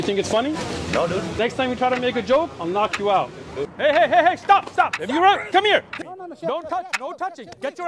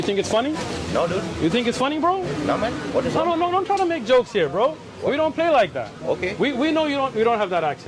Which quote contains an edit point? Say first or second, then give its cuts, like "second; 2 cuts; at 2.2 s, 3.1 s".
first; 3 cuts; at 1.4 s, 3.7 s, 5.9 s